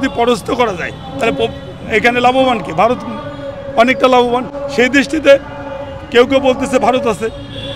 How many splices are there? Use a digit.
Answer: 0